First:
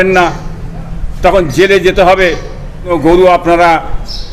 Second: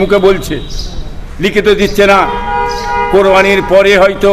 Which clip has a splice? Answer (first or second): first